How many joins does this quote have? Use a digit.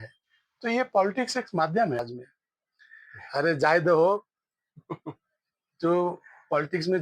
1